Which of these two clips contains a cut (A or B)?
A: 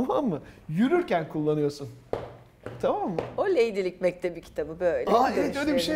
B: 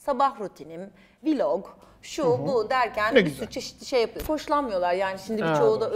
B